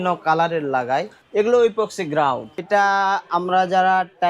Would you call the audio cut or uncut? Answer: cut